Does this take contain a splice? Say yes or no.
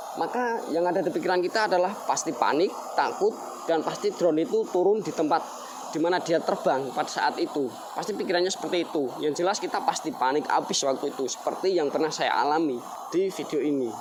no